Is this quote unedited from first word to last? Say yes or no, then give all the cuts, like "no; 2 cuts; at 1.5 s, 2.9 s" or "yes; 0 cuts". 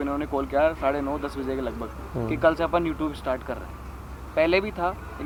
yes; 0 cuts